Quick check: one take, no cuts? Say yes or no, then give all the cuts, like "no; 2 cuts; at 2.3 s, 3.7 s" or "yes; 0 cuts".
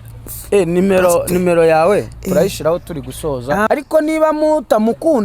no; 1 cut; at 3.7 s